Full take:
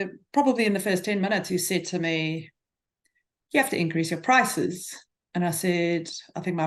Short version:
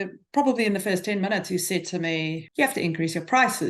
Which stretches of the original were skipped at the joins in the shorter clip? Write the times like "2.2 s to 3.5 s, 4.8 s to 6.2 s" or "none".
2.4 s to 3.4 s

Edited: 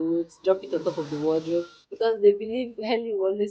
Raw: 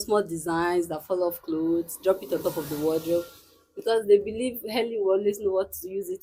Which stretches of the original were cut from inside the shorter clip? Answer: 3.4 s to 3.7 s

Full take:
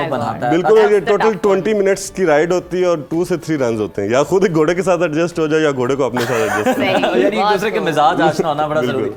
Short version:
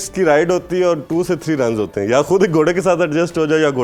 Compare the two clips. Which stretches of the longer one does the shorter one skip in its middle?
none

